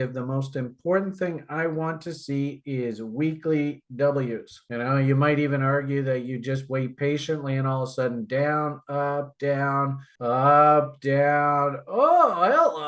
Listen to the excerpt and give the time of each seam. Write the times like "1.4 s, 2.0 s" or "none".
none